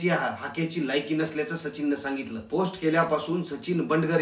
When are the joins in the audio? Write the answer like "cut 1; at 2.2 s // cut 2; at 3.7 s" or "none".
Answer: cut 1; at 2.4 s

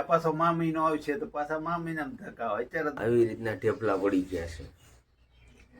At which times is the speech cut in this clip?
cut 1; at 3.0 s

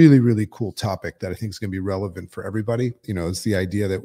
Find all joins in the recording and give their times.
cut 1; at 3.0 s

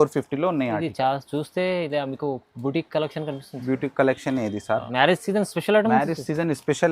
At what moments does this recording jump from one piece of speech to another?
cut 1; at 4.9 s

